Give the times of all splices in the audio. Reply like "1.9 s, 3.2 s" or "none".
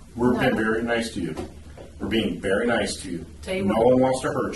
none